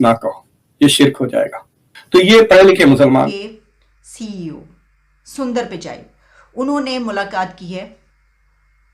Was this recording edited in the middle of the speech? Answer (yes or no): yes